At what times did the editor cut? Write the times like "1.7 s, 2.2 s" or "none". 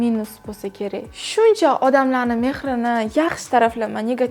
1.1 s